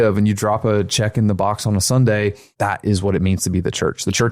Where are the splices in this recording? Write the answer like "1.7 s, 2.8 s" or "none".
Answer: 2.5 s